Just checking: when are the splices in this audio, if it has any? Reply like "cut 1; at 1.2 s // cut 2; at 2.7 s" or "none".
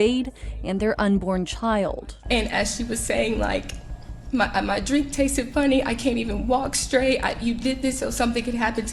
none